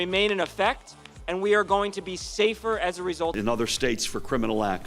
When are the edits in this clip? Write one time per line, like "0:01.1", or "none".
0:03.4

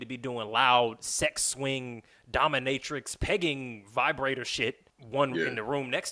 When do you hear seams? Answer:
0:04.9

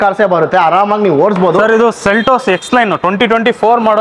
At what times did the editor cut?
0:01.6

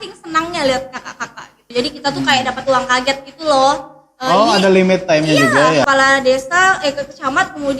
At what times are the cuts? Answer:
0:01.6
0:05.9

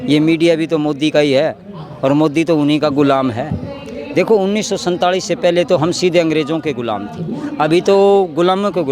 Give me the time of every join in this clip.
none

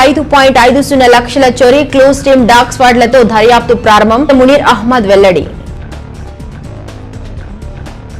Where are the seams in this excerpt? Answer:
0:05.6

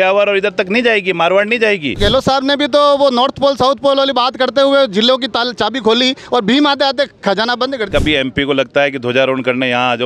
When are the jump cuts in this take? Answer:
0:02.0
0:07.9

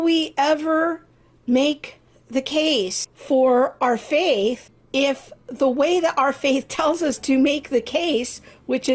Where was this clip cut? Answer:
0:03.1
0:04.7

